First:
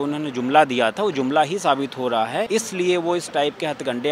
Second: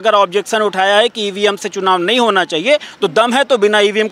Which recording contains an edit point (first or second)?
first